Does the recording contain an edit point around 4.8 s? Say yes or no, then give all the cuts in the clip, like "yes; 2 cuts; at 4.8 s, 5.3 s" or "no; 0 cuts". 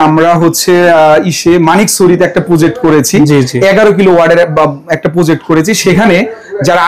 no; 0 cuts